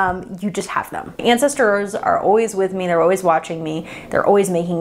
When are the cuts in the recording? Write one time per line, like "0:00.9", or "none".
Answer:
0:01.2